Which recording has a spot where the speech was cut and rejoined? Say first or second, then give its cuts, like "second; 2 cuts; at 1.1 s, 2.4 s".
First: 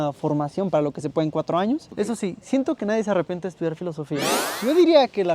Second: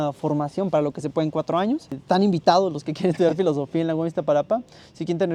first; 2 cuts; at 1.9 s, 4.4 s